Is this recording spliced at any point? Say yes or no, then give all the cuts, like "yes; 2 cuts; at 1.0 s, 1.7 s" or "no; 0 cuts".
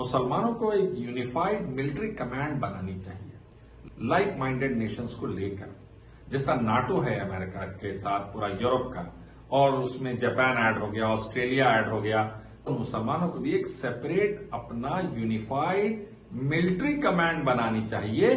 no; 0 cuts